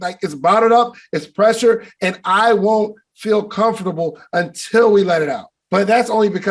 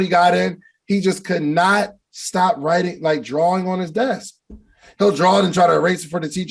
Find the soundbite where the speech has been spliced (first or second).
first